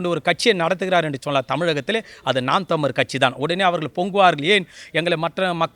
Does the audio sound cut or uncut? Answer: uncut